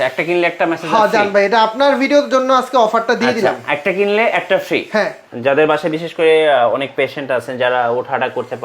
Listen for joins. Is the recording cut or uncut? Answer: cut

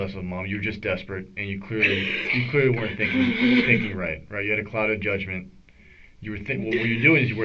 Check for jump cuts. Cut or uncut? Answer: uncut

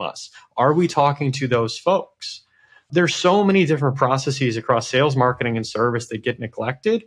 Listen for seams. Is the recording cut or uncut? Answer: cut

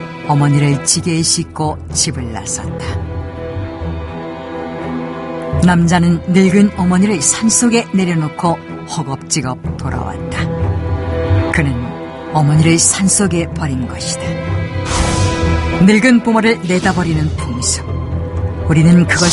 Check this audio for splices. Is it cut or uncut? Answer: uncut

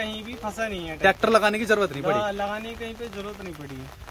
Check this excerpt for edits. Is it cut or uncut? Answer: uncut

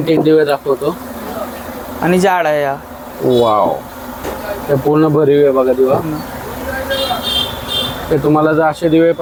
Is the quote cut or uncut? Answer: uncut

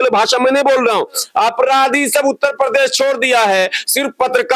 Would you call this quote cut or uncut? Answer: uncut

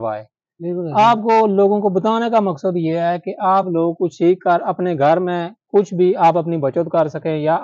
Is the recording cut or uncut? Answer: uncut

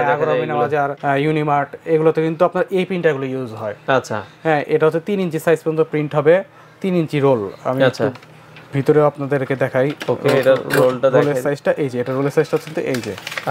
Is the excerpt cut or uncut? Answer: uncut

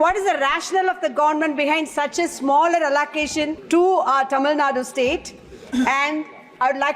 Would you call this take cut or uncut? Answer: cut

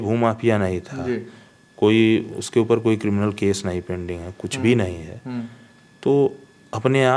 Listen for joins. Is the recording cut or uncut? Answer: uncut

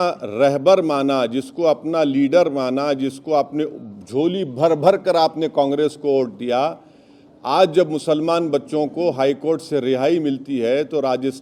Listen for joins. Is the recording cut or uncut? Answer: uncut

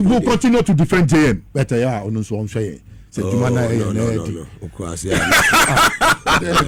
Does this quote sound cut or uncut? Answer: uncut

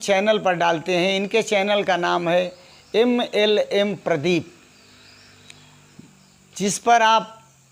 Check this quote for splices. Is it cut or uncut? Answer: uncut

